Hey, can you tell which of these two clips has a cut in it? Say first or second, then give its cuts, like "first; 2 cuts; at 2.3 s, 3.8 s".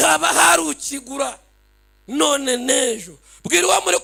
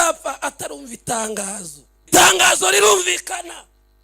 second; 1 cut; at 2.1 s